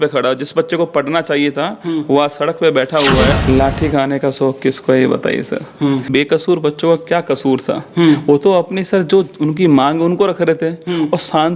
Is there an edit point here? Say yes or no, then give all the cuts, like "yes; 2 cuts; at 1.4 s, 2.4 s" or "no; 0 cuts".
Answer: yes; 2 cuts; at 3.3 s, 6.1 s